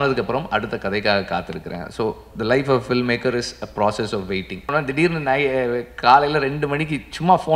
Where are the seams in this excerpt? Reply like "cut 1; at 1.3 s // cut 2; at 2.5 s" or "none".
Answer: cut 1; at 4.7 s